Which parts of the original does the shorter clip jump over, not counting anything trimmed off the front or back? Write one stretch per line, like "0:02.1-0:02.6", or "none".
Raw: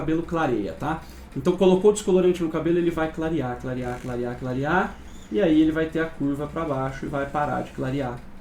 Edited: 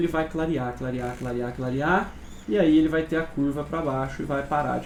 none